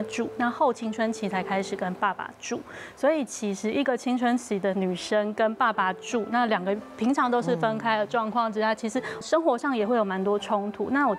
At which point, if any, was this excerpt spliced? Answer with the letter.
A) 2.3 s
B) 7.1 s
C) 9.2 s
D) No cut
C